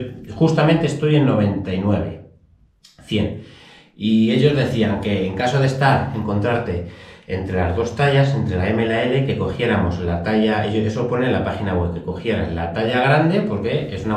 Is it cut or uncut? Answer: uncut